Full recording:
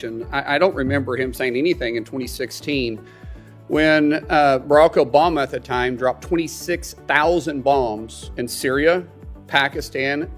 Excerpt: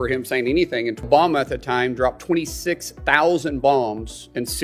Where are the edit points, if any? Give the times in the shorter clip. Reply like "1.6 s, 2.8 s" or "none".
1.1 s